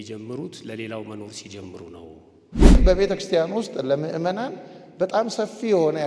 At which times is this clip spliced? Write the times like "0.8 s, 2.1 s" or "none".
2.8 s